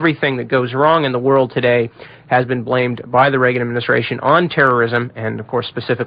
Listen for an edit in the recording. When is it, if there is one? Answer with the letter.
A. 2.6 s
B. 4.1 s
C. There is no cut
C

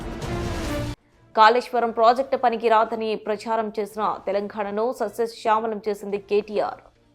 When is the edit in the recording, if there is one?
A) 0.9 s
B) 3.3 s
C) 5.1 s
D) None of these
A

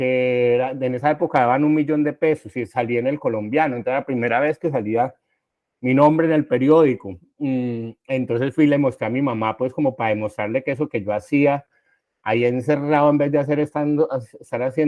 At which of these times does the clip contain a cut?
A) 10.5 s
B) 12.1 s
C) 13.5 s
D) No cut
D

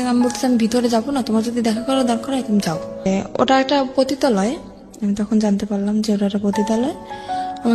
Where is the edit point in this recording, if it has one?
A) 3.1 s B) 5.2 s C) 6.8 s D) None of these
A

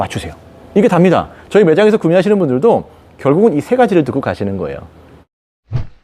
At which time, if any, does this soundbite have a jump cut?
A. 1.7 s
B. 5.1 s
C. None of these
B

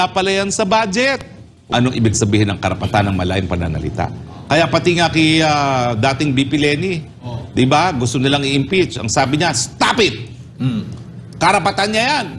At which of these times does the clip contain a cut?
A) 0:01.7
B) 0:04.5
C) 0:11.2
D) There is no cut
A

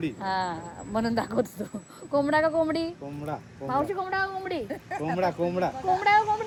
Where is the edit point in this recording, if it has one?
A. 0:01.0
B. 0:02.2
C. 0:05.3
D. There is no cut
D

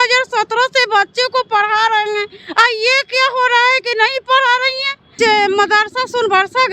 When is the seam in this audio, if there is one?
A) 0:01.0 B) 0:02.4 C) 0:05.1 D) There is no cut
C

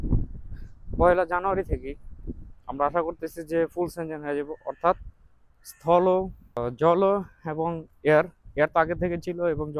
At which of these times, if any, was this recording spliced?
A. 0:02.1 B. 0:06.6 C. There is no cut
B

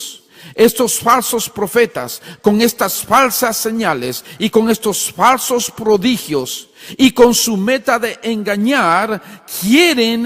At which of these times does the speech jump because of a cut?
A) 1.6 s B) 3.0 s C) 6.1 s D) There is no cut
B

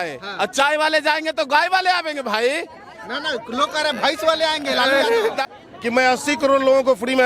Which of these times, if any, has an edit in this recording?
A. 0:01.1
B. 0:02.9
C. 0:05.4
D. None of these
C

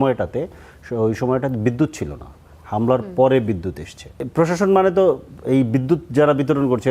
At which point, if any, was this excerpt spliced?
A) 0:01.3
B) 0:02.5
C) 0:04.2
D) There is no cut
C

